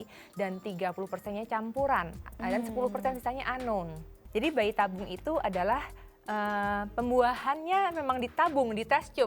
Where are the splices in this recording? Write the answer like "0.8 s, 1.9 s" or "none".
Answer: 4.2 s